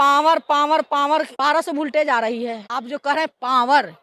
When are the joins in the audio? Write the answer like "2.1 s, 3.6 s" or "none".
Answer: 1.3 s